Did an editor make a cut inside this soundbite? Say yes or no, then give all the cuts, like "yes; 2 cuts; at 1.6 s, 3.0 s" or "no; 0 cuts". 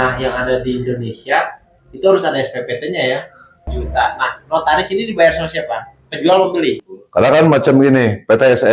yes; 2 cuts; at 3.7 s, 6.9 s